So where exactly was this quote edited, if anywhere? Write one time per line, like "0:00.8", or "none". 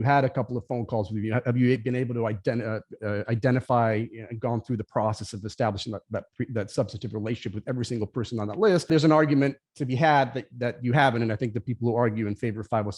0:08.9